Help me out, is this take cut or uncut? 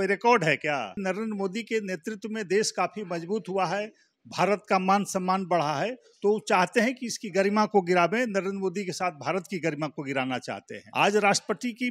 cut